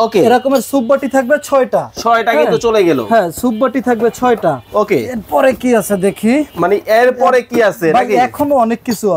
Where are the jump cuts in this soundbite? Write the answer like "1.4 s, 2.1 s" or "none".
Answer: none